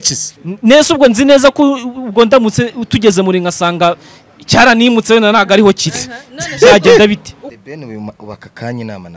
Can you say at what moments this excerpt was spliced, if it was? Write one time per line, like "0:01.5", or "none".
0:07.5